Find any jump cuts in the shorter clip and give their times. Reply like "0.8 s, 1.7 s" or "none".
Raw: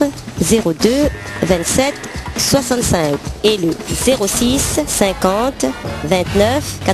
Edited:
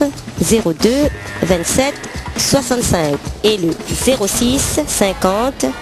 none